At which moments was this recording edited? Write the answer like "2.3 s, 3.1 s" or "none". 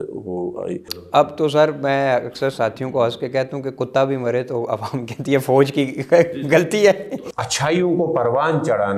1.0 s, 7.2 s